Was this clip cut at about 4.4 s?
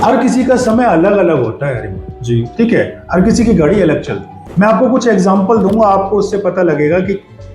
yes; 1 cut; at 4.4 s

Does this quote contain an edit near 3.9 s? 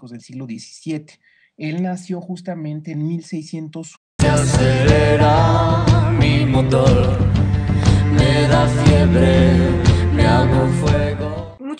no; 0 cuts

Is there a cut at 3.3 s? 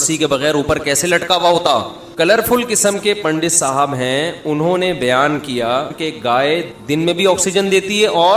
no; 3 cuts; at 2.0 s, 5.9 s, 6.7 s

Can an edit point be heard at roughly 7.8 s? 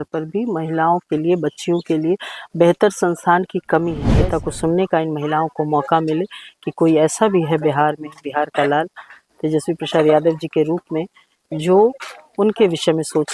no; 1 cut; at 4.0 s

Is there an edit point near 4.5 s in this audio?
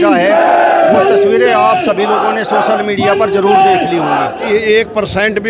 yes; 1 cut; at 4.5 s

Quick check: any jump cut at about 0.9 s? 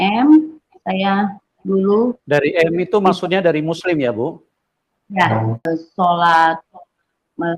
no; 1 cut; at 5.6 s

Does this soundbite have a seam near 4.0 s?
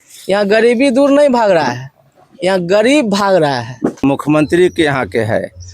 yes; 1 cut; at 4.0 s

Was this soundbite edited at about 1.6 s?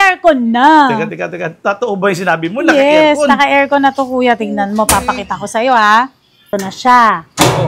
no; 1 cut; at 6.5 s

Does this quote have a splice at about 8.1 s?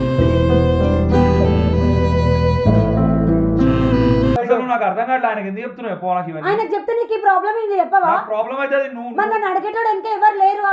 no; 1 cut; at 4.4 s

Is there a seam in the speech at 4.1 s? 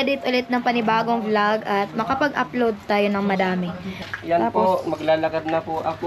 yes; 1 cut; at 4.1 s

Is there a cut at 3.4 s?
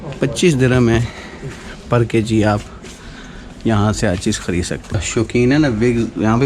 no; 1 cut; at 5.0 s

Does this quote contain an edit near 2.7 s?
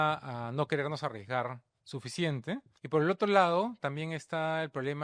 yes; 1 cut; at 2.7 s

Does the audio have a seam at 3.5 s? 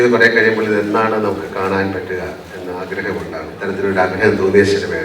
yes; 1 cut; at 3.5 s

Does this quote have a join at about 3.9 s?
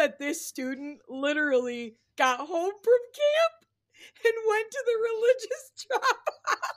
no; 0 cuts

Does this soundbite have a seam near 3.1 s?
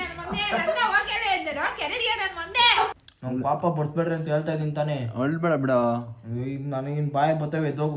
yes; 1 cut; at 3.1 s

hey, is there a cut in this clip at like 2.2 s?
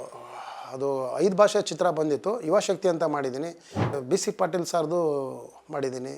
no; 1 cut; at 3.9 s

